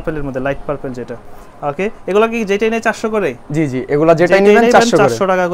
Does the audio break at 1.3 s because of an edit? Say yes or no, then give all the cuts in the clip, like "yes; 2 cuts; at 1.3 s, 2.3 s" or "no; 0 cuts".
no; 0 cuts